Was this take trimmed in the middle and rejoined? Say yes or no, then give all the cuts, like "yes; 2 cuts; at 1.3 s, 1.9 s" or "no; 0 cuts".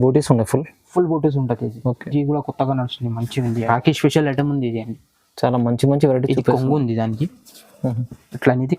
yes; 1 cut; at 3.6 s